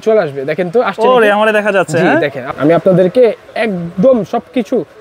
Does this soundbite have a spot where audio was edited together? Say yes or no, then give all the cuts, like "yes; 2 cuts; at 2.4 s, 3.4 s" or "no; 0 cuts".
yes; 1 cut; at 2.4 s